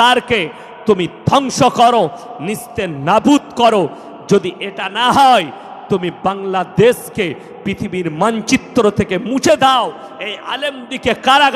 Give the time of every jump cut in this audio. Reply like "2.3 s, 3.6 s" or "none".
none